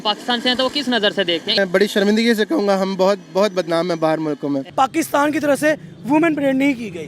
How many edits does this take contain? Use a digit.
2